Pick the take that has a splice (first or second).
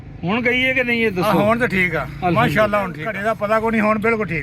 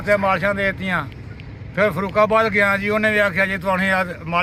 first